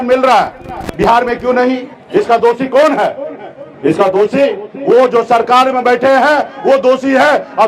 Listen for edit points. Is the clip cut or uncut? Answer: cut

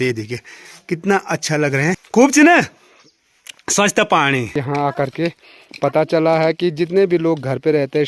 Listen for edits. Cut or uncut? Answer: cut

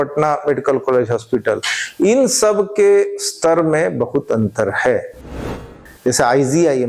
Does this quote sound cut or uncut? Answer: cut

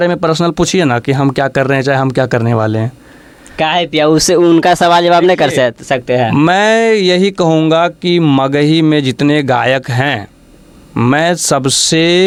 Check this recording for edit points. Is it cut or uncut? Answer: uncut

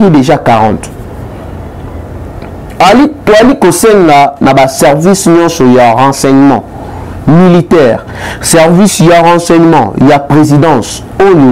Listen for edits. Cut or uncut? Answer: uncut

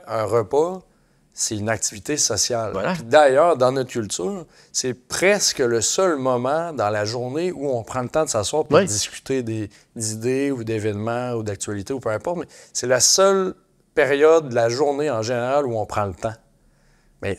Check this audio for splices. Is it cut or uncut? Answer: uncut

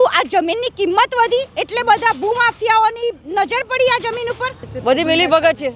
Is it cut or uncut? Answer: cut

